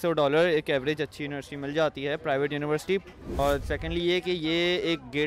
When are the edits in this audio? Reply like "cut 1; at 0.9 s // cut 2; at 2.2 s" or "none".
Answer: cut 1; at 3.2 s